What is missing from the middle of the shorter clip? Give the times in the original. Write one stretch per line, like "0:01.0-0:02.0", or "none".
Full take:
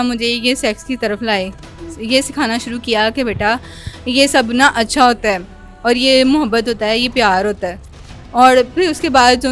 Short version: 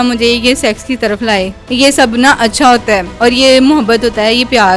0:01.6-0:03.9
0:05.4-0:05.7